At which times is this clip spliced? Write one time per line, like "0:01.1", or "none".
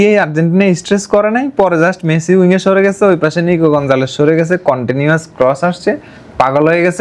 none